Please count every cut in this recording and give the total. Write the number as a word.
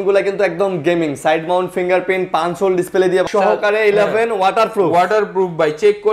one